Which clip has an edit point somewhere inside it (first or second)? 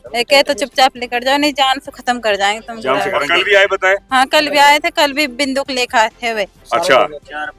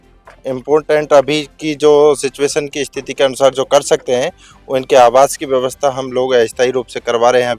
first